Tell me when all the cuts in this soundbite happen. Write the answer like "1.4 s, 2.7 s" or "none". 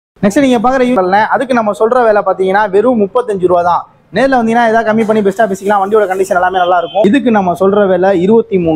1.0 s, 7.0 s